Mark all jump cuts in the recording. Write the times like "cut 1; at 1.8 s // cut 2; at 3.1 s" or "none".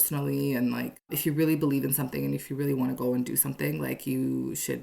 cut 1; at 1.1 s